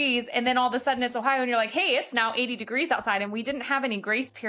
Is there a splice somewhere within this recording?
no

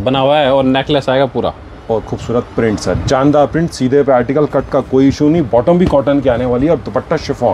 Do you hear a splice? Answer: no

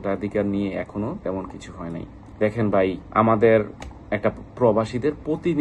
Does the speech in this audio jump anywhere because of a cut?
no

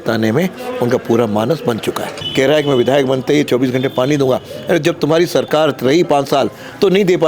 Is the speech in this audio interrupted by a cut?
yes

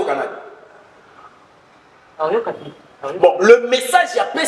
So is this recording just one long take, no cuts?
yes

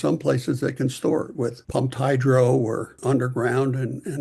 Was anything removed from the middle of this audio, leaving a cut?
yes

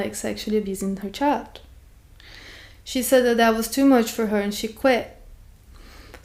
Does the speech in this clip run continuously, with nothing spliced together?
yes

